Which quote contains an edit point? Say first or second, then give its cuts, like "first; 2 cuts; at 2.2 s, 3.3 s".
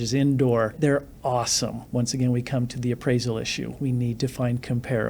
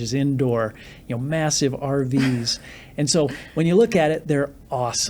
first; 2 cuts; at 0.8 s, 1.8 s